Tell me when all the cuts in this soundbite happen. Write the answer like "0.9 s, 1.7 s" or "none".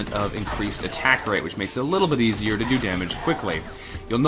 1.8 s